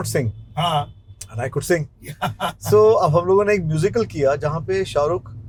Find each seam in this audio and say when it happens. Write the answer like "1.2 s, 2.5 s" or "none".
none